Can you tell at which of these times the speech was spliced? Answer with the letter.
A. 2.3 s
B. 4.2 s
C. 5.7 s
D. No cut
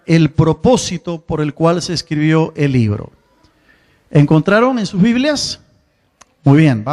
A